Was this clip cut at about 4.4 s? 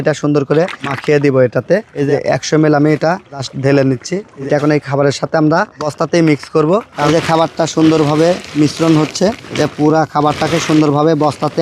yes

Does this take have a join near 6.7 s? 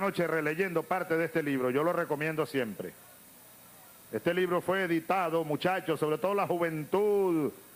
no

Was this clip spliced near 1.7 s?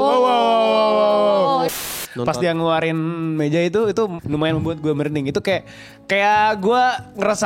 yes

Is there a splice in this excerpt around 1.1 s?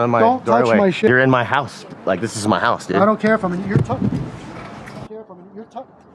yes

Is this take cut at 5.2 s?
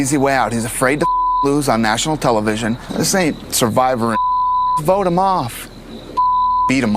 no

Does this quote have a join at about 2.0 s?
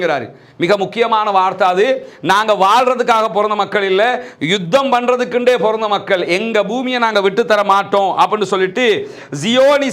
no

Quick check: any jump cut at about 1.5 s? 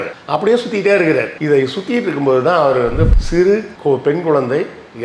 no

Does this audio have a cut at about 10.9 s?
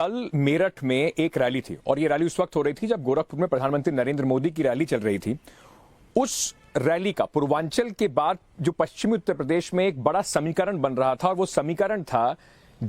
yes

